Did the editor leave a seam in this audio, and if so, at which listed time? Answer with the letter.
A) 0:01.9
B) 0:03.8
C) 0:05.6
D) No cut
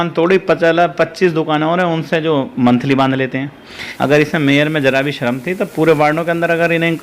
B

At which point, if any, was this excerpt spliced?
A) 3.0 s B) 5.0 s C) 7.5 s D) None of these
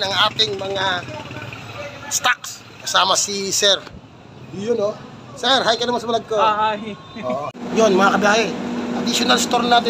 C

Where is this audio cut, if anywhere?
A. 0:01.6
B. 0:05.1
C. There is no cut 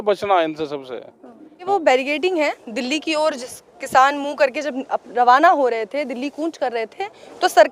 A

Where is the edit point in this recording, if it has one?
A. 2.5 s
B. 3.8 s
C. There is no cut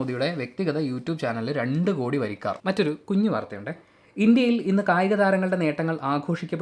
A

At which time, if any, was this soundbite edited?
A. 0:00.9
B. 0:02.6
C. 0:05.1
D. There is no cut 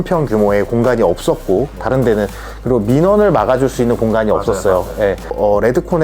C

